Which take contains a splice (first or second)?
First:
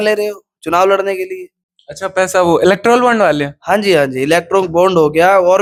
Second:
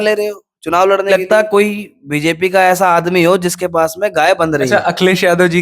second